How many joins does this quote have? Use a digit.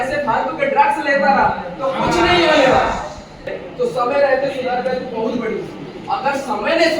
1